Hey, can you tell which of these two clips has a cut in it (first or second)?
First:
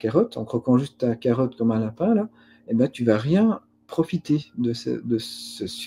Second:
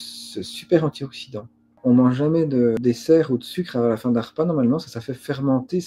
second